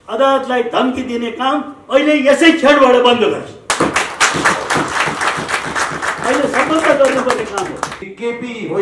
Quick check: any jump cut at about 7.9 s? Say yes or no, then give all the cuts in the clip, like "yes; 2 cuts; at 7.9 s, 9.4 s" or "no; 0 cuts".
yes; 1 cut; at 7.9 s